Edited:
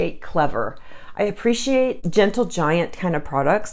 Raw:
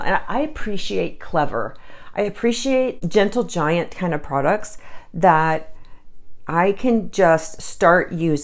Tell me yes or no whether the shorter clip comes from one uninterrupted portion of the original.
yes